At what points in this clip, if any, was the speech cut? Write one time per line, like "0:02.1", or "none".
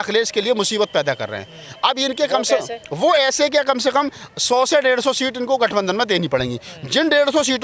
none